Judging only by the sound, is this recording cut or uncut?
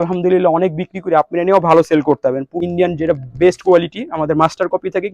cut